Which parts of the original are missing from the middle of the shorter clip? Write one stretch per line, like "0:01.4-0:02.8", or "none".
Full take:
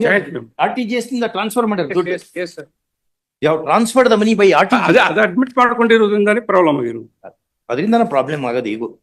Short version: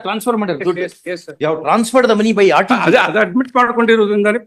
0:02.6-0:03.3